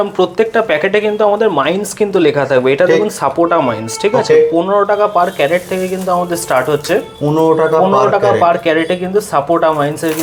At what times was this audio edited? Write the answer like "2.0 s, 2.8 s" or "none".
none